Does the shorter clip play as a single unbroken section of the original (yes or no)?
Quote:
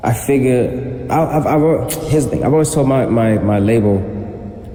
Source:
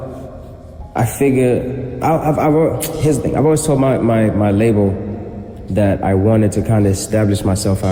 yes